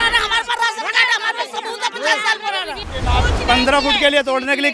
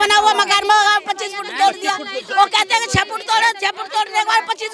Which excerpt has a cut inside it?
first; 1 cut; at 2.8 s

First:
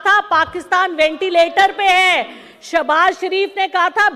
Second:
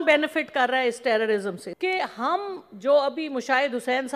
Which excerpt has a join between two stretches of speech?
second; 1 cut; at 1.6 s

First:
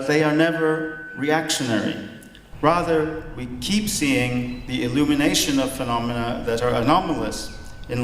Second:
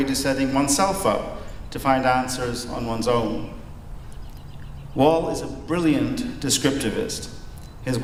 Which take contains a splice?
first; 1 cut; at 7.0 s

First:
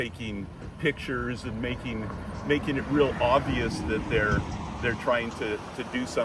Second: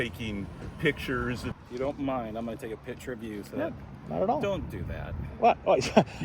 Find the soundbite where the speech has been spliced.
second; 1 cut; at 1.5 s

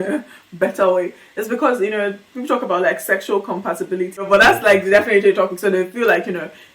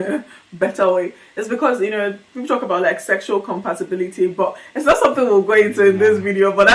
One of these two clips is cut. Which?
first; 1 cut; at 4.2 s

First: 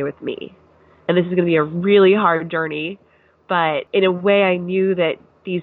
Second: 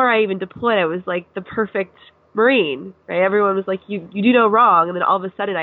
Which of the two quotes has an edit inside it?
first; 1 cut; at 3.9 s

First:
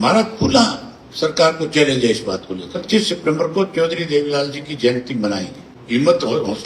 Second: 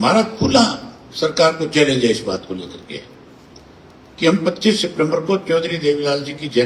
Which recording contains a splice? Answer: first; 2 cuts; at 2.8 s, 5.7 s

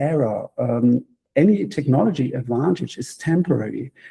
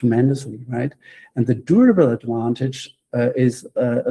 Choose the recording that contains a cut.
first; 1 cut; at 1.2 s

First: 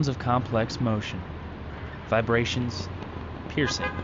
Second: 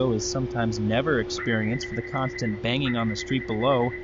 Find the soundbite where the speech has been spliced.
second; 1 cut; at 1.3 s

